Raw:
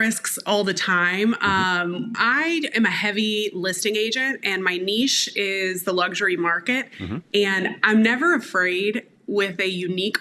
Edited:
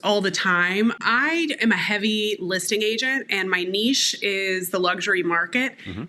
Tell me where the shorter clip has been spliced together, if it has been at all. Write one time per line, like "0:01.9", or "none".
0:01.0